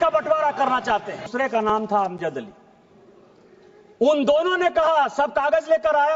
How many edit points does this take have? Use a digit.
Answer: 1